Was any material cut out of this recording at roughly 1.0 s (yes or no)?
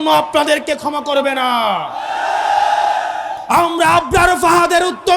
no